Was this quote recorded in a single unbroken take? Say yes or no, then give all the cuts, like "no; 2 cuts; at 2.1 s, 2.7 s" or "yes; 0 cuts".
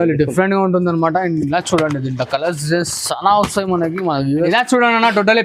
no; 1 cut; at 4.5 s